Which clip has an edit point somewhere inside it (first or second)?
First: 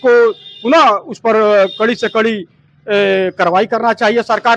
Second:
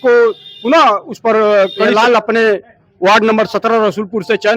second